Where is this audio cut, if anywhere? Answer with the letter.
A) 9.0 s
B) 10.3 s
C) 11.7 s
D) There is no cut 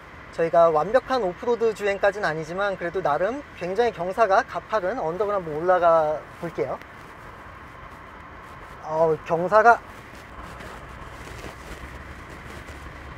B